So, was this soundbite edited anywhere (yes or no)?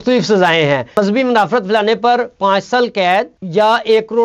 yes